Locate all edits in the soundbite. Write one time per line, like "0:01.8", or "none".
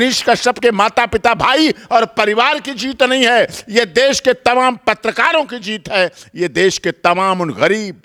none